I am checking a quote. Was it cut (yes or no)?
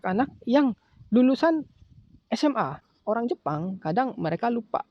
yes